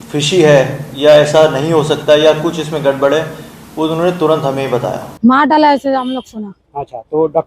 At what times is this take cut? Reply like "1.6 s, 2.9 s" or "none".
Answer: 5.0 s